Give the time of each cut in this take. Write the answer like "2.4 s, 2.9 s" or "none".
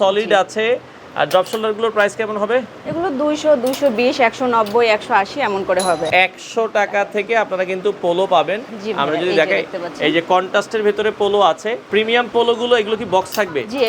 6.1 s, 11.9 s